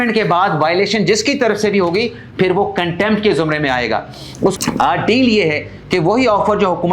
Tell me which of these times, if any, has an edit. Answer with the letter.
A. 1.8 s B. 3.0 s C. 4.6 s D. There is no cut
C